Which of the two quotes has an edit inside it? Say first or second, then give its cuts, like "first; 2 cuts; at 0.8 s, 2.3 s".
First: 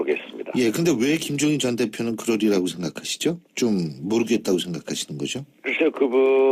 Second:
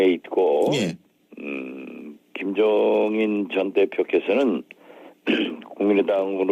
second; 1 cut; at 3.9 s